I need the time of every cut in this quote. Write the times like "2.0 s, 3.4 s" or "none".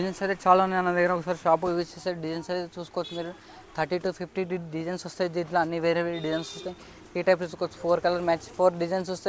none